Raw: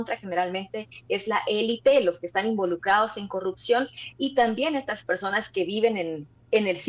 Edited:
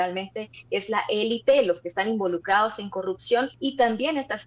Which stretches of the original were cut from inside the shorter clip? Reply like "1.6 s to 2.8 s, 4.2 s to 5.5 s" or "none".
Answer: 3.9 s to 4.1 s